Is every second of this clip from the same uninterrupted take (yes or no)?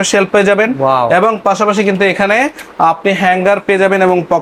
yes